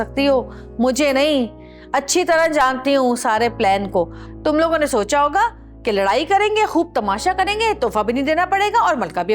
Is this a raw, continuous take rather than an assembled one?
yes; 0 cuts

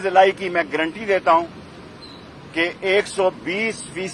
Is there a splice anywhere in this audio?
no; 0 cuts

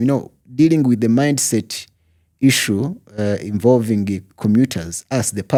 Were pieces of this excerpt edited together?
no; 0 cuts

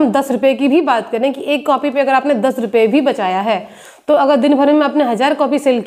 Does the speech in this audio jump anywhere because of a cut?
no; 0 cuts

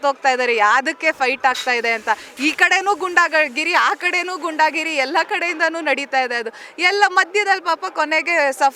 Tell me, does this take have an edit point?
no; 0 cuts

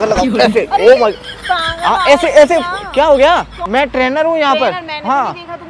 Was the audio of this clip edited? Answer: yes; 1 cut; at 3.5 s

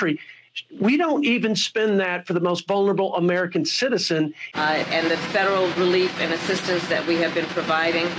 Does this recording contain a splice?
yes; 1 cut; at 4.4 s

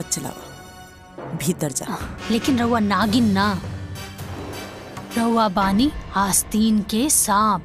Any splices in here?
yes; 1 cut; at 2.1 s

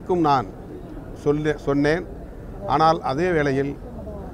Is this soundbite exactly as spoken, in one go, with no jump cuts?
yes; 0 cuts

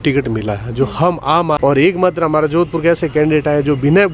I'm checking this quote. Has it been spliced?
yes; 1 cut; at 1.6 s

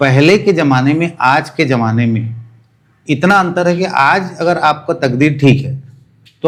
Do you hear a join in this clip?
no; 0 cuts

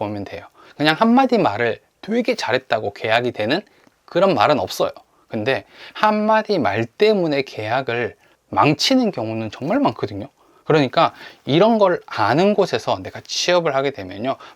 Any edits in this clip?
no; 0 cuts

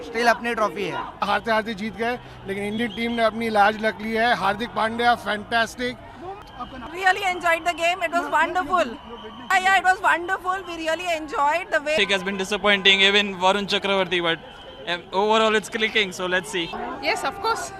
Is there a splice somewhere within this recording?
yes; 4 cuts; at 1.2 s, 6.4 s, 12.0 s, 16.7 s

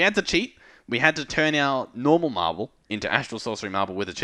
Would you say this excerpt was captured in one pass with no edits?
yes; 0 cuts

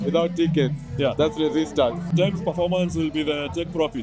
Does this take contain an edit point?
yes; 1 cut; at 2.1 s

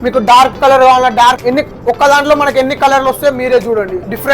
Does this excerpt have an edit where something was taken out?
yes; 1 cut; at 1.4 s

